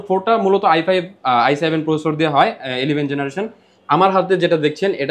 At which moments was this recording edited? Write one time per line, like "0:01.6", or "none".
none

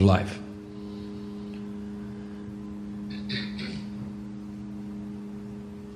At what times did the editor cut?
0:03.4

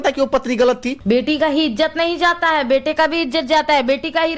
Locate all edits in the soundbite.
0:00.9

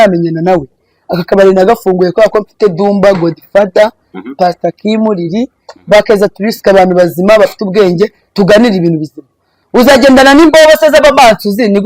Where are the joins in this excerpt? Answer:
none

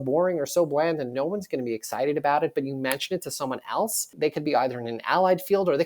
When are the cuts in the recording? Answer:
0:04.1

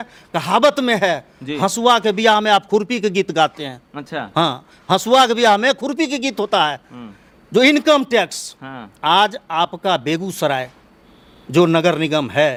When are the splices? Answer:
none

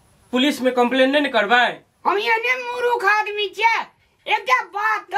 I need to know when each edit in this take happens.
none

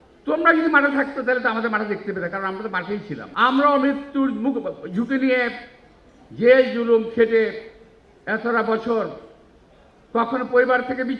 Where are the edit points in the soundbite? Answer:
0:03.3

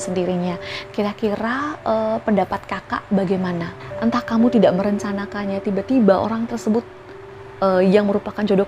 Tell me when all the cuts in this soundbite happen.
0:03.8

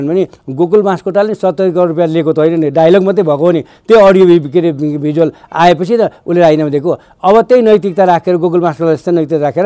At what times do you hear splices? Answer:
none

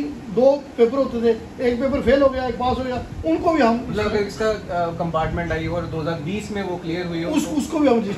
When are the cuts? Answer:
none

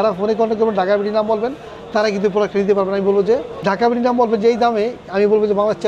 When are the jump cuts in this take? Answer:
0:03.6

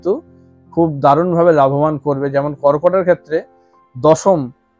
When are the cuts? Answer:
none

